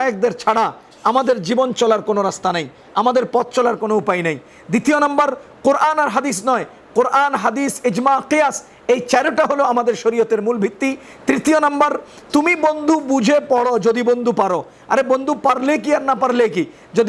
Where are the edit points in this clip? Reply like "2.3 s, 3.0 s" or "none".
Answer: none